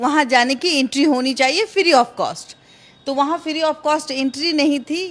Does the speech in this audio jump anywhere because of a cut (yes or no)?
no